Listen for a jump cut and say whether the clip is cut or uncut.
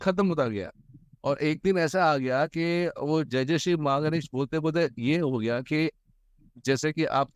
uncut